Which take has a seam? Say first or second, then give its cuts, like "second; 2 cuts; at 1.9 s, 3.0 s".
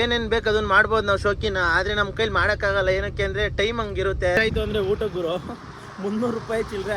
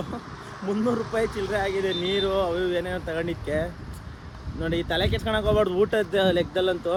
first; 1 cut; at 4.4 s